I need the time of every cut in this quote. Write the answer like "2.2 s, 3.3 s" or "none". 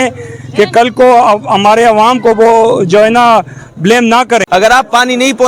4.5 s